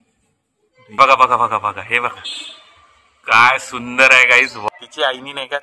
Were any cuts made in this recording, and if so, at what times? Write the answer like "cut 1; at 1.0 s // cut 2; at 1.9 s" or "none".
cut 1; at 1.0 s // cut 2; at 4.6 s